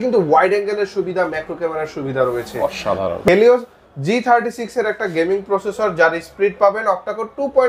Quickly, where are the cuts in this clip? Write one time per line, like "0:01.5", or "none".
0:03.3